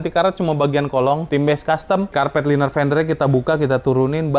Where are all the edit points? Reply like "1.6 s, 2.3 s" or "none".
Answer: 2.1 s